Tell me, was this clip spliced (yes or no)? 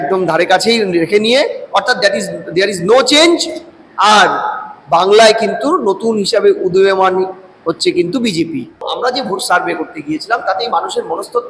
yes